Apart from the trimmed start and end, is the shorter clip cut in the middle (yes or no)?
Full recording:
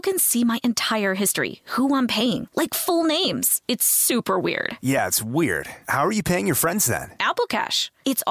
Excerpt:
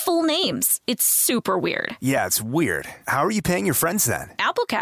no